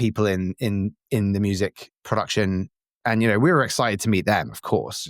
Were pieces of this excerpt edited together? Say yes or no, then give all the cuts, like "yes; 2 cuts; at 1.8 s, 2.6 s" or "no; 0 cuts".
yes; 2 cuts; at 1.9 s, 3.0 s